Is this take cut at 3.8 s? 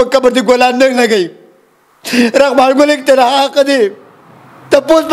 no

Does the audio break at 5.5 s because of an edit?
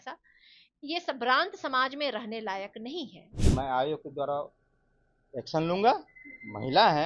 no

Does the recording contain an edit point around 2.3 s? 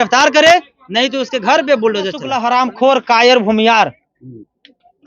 yes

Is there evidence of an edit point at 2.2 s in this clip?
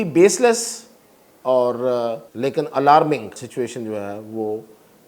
yes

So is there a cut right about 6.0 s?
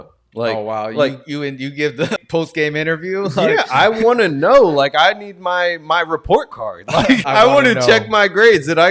no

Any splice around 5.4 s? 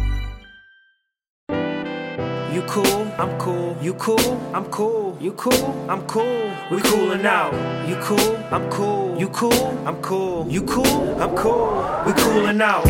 no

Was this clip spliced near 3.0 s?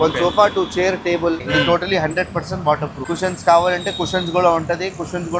yes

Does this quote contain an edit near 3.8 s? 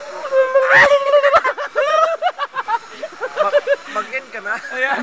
no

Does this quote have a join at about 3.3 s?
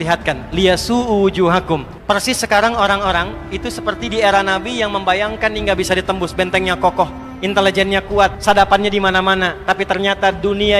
no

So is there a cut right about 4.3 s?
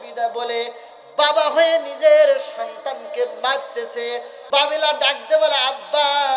yes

